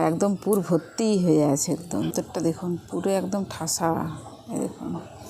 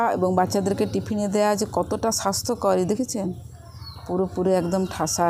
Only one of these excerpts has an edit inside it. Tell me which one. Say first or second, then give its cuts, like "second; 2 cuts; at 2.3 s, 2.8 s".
first; 1 cut; at 2.1 s